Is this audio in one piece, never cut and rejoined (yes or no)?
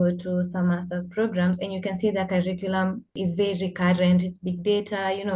no